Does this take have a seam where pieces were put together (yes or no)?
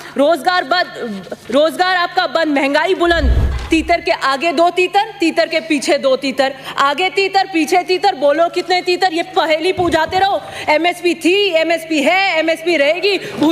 yes